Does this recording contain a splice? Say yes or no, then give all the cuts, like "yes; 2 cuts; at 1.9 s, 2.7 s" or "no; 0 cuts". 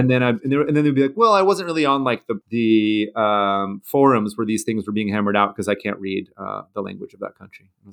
yes; 1 cut; at 2.3 s